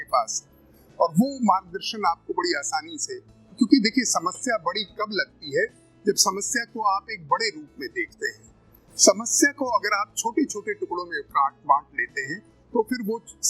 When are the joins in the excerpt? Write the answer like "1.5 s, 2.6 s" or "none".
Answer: 3.4 s